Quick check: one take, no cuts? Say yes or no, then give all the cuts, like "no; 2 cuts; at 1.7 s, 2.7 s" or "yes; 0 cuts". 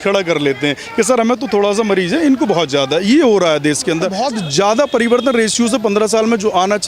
no; 1 cut; at 4.2 s